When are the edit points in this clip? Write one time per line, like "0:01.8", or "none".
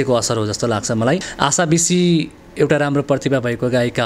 0:01.3